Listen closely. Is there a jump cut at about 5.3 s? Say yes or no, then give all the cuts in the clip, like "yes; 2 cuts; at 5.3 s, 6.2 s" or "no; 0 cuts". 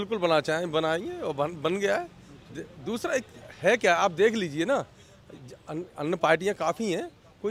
no; 0 cuts